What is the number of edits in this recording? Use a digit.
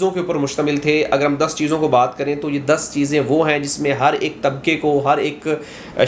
0